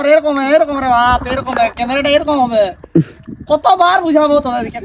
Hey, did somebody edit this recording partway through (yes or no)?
no